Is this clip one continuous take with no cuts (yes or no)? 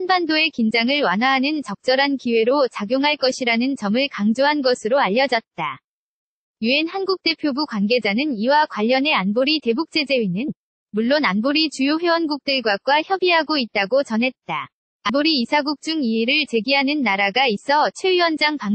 no